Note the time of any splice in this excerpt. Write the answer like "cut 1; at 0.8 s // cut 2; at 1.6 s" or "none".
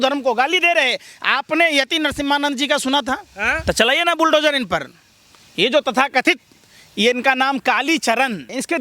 cut 1; at 3.4 s